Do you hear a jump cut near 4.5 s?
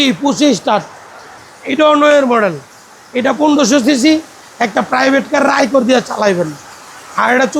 no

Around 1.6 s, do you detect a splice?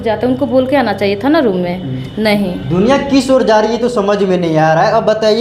no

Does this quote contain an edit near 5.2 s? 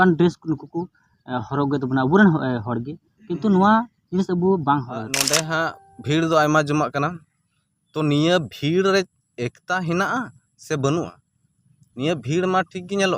yes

